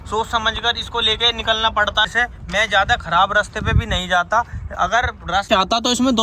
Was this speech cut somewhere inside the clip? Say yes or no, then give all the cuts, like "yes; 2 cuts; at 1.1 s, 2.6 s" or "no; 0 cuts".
yes; 2 cuts; at 2.0 s, 5.5 s